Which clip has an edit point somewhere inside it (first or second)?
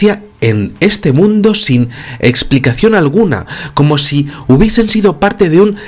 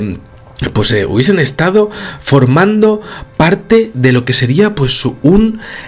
first